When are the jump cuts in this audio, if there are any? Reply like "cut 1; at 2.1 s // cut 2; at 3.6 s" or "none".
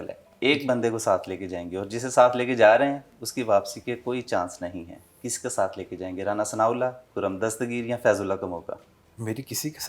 none